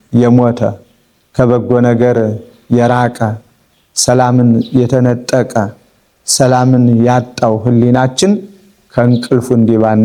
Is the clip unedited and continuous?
yes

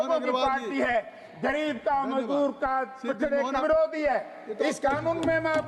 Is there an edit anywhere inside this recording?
yes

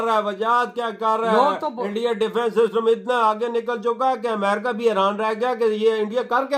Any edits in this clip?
no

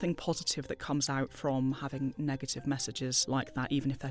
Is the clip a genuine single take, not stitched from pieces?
no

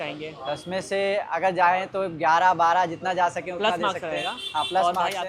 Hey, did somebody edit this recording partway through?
no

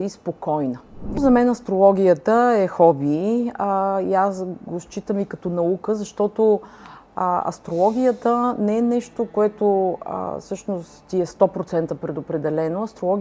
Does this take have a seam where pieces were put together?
yes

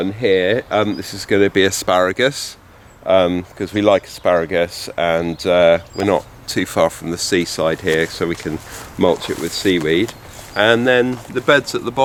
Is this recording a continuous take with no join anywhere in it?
yes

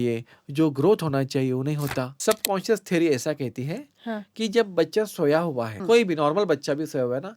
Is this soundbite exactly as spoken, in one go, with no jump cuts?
no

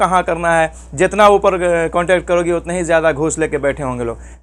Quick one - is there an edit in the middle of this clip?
no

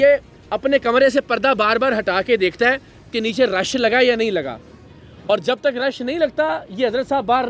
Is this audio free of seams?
yes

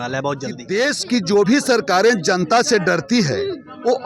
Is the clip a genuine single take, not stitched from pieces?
no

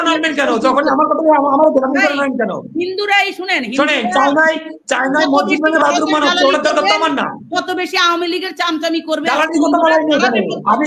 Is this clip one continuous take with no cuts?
yes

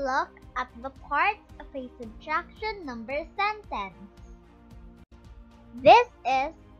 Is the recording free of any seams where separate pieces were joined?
no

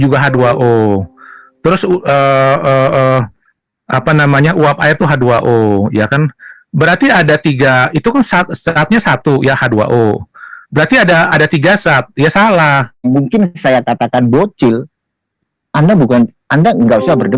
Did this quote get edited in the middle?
yes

